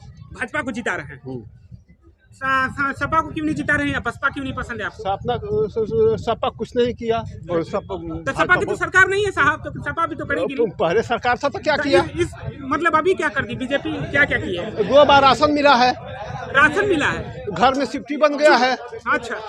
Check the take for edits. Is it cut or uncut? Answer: uncut